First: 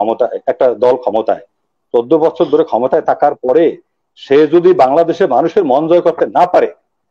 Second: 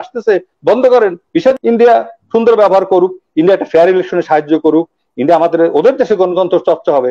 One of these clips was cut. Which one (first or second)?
second